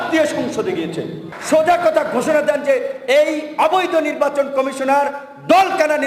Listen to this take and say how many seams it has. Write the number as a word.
one